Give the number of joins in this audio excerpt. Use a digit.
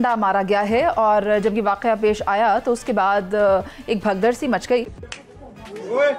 1